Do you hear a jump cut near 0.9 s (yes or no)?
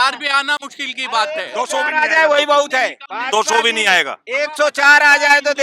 no